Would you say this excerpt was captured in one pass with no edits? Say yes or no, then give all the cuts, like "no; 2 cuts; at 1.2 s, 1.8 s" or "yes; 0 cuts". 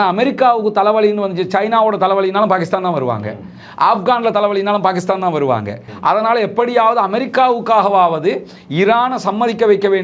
no; 1 cut; at 5.9 s